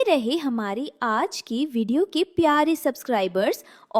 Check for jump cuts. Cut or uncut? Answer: uncut